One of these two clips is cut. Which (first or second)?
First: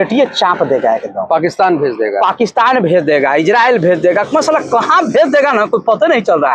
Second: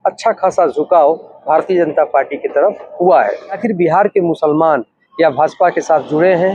second